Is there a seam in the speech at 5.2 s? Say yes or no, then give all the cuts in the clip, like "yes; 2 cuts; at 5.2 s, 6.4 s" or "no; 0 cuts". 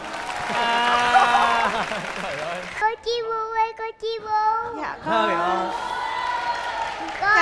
no; 1 cut; at 2.5 s